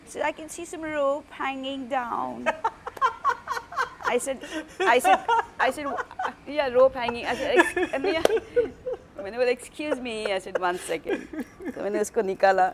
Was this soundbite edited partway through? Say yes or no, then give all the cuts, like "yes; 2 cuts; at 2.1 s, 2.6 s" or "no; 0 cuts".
no; 0 cuts